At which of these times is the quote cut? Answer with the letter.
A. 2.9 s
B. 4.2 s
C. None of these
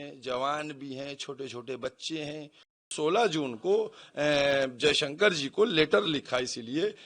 A